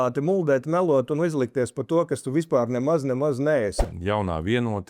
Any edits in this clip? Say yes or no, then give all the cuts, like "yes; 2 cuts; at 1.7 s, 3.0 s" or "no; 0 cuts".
yes; 1 cut; at 3.8 s